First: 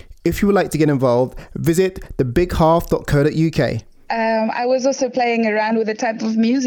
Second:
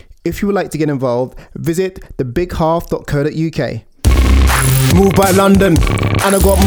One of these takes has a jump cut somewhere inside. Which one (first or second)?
first